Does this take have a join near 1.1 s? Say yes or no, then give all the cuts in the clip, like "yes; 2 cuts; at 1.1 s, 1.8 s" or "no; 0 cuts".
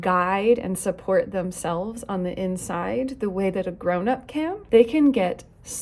no; 1 cut; at 4.6 s